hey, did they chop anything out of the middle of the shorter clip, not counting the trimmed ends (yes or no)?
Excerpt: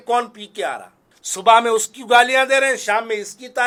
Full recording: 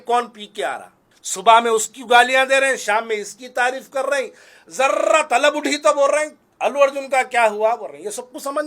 no